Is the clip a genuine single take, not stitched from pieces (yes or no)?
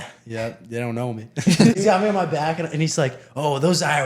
no